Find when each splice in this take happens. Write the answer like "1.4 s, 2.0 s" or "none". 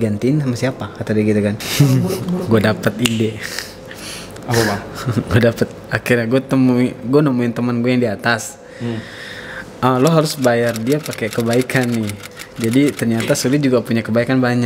none